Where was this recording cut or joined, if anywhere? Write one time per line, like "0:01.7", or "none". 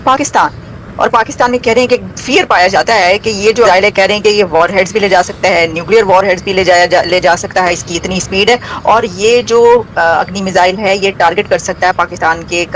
0:03.7